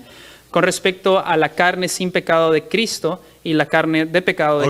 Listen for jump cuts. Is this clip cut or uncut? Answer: uncut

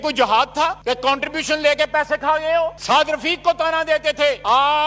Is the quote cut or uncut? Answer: cut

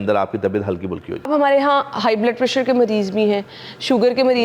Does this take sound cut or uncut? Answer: cut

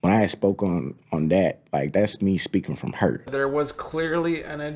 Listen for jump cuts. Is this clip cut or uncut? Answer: cut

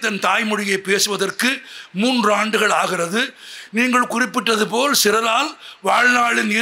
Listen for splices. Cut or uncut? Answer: uncut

